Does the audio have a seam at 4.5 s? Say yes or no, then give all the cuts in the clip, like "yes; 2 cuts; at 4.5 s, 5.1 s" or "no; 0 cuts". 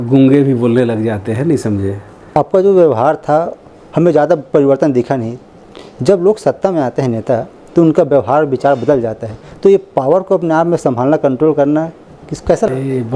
no; 1 cut; at 2.3 s